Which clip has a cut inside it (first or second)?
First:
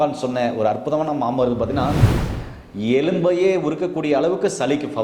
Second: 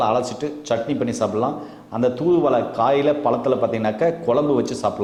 first